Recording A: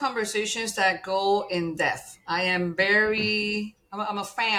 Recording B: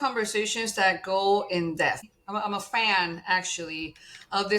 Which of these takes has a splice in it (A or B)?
B